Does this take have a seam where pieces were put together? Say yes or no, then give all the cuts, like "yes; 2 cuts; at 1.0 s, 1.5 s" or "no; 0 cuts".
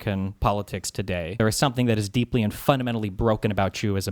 yes; 1 cut; at 1.3 s